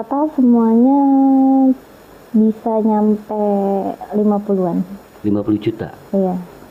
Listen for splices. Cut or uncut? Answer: uncut